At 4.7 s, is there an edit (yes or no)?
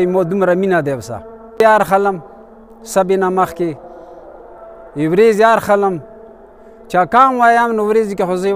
no